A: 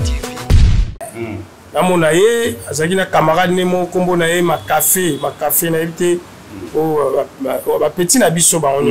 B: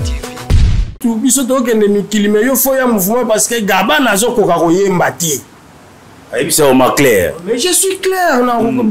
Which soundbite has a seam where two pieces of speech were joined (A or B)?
B